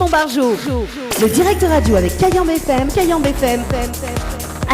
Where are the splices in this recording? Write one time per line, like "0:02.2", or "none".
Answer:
0:01.0